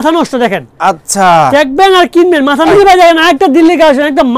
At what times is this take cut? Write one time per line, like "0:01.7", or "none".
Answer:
0:02.7